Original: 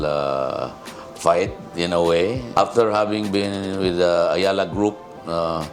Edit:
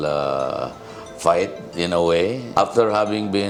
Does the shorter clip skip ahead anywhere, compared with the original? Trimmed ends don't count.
no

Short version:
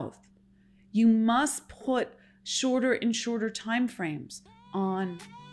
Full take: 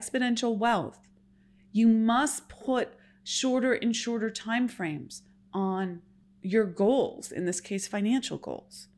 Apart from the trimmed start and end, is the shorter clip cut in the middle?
no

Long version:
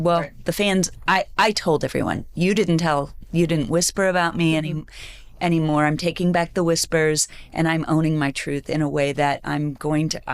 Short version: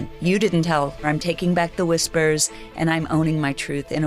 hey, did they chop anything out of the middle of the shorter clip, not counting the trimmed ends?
yes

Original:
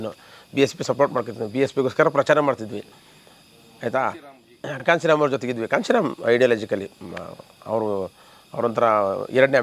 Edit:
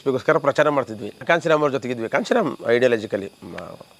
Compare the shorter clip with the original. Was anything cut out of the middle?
yes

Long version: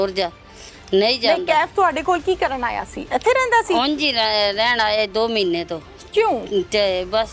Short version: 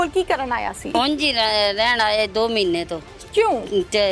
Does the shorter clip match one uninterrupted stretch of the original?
no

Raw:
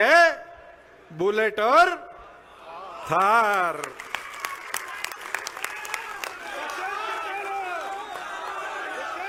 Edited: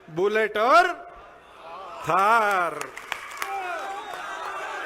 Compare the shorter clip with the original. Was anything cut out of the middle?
yes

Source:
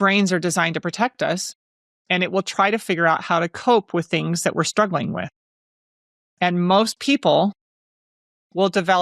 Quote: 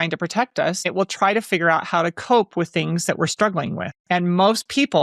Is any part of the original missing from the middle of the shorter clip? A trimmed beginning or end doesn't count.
yes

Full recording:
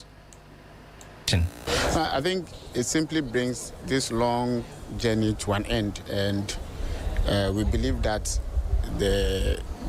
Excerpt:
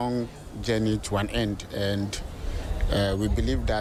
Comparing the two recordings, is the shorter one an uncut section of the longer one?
yes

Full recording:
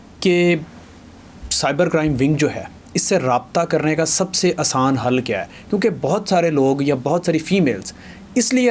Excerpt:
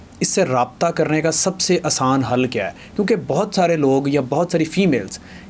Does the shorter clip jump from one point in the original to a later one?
no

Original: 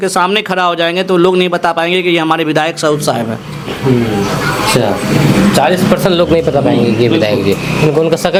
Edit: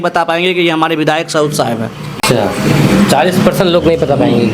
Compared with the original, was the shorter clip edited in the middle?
yes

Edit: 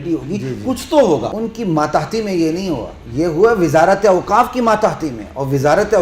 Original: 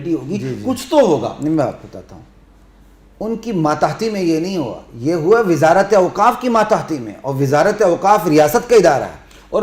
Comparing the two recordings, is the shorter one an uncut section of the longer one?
no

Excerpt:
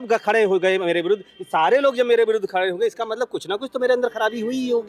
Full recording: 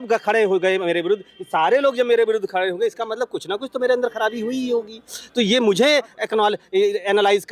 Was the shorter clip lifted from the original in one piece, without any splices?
yes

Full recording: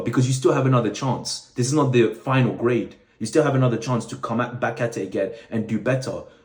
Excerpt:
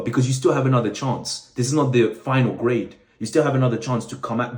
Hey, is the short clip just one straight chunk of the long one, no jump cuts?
yes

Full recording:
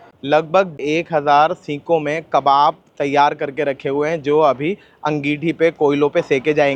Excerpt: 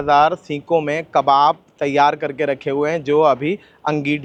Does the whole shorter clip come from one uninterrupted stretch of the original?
yes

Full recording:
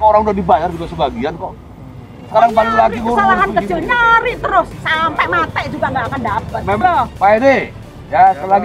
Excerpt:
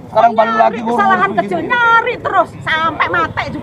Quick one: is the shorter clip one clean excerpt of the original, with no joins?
yes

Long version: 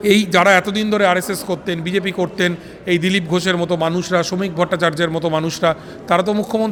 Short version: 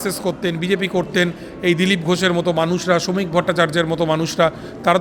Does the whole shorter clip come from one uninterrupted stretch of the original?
yes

